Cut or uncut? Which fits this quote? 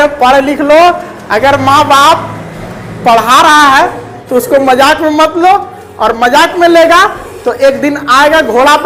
uncut